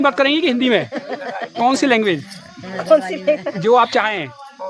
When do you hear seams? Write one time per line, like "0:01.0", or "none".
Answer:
none